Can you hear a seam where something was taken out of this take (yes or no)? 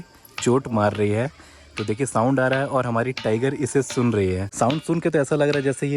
yes